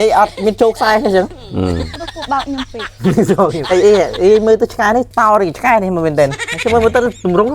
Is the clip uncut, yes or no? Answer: no